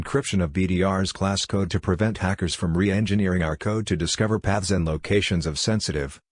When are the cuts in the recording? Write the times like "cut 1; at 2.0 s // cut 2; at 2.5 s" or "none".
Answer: none